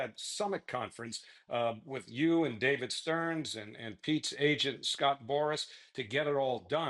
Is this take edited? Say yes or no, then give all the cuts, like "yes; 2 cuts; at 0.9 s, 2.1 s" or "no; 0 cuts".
no; 0 cuts